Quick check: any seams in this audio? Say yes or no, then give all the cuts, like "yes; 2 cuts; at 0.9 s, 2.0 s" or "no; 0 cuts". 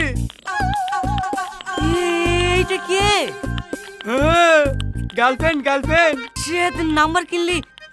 yes; 1 cut; at 6.3 s